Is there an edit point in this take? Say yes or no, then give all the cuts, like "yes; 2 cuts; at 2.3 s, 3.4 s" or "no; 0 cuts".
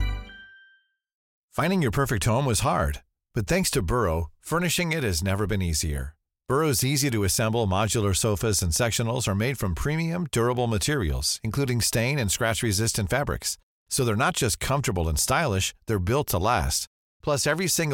yes; 1 cut; at 1.2 s